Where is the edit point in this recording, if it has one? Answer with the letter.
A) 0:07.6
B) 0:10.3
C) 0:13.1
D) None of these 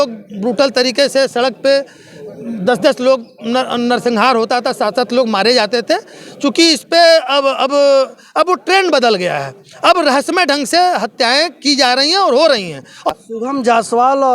C